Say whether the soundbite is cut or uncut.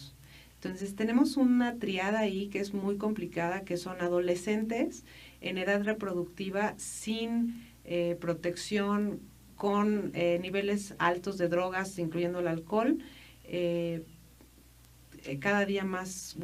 uncut